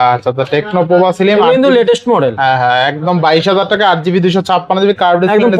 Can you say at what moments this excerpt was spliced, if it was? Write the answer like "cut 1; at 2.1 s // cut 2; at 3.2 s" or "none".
none